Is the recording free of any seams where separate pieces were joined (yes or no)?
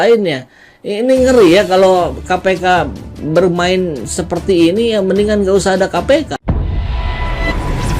yes